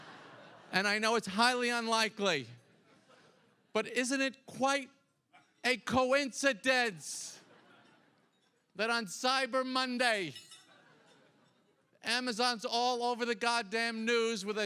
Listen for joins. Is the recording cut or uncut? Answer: uncut